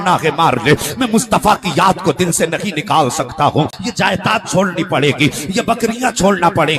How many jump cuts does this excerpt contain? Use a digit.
1